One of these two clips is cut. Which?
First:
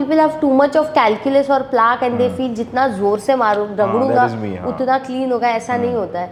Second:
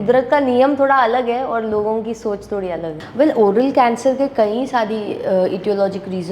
second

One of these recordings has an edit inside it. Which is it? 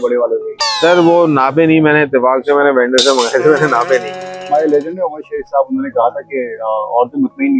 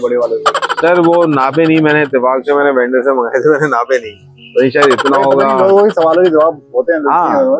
first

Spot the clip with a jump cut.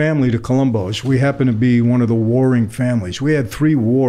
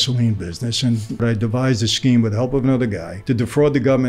second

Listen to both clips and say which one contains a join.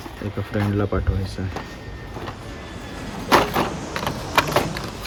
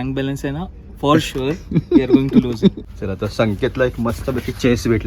second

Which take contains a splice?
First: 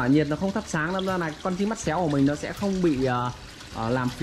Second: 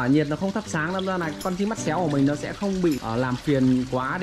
second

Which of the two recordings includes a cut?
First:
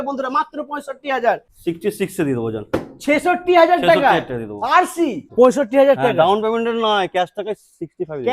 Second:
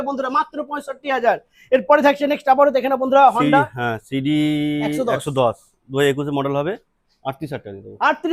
first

